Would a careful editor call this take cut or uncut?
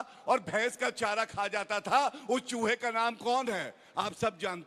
uncut